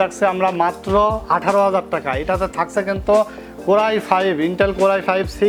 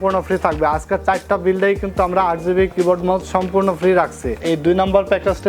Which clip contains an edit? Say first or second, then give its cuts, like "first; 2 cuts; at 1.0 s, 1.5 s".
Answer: second; 1 cut; at 4.4 s